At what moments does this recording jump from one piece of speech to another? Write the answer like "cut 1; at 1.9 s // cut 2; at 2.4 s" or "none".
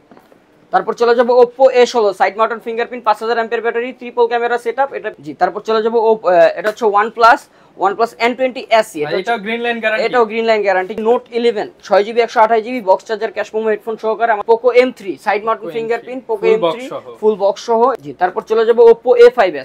cut 1; at 5.0 s // cut 2; at 10.9 s // cut 3; at 14.4 s // cut 4; at 18.0 s